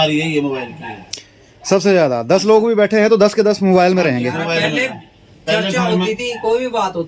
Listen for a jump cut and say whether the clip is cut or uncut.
uncut